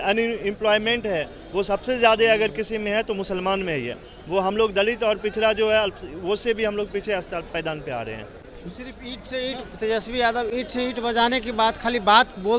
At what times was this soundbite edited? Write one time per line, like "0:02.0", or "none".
none